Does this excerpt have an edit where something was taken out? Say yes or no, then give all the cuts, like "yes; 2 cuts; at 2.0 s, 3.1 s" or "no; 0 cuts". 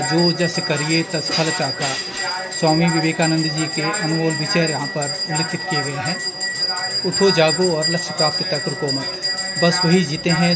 no; 0 cuts